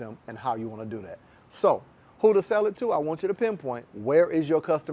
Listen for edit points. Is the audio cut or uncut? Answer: uncut